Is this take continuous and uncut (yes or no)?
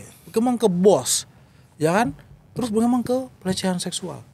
yes